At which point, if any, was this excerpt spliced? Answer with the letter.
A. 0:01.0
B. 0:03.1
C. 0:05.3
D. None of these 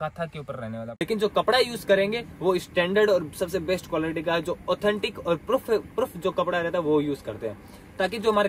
A